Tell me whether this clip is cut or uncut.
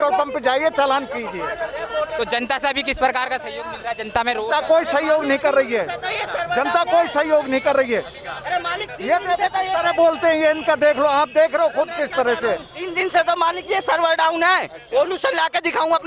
uncut